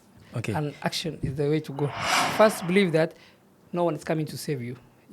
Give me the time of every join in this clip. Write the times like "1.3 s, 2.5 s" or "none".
2.0 s